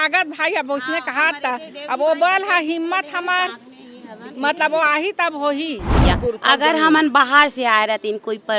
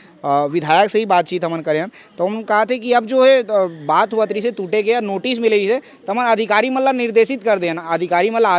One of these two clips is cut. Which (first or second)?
first